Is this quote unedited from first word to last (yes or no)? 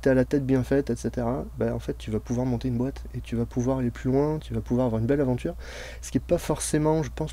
yes